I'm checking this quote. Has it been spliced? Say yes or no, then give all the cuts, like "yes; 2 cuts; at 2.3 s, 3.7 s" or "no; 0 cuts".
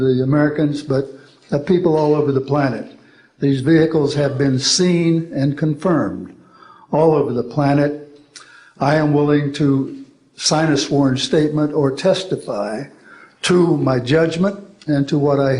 no; 0 cuts